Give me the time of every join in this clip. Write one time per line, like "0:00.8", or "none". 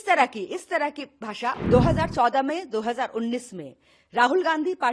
0:01.6